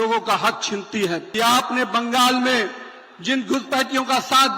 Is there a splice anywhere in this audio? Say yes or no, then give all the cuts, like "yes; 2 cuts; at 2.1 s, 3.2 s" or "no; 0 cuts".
yes; 1 cut; at 1.3 s